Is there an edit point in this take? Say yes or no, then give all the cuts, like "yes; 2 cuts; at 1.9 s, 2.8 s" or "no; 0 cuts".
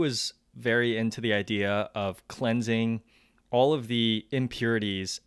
no; 0 cuts